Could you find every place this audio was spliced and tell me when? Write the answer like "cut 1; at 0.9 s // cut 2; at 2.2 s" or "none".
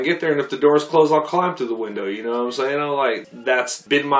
cut 1; at 3.3 s